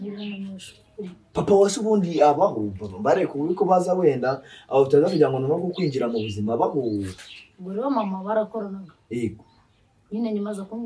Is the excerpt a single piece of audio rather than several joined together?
no; 1 cut; at 7.2 s

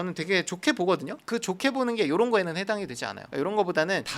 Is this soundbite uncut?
yes; 0 cuts

